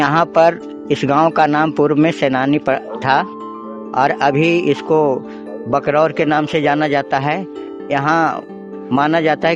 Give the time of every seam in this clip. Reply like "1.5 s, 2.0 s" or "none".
none